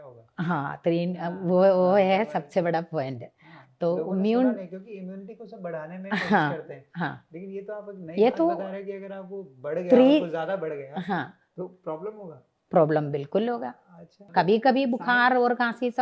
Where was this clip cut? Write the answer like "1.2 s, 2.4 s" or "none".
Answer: 14.2 s